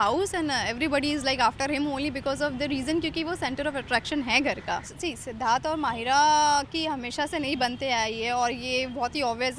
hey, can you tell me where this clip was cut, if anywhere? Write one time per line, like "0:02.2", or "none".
0:04.9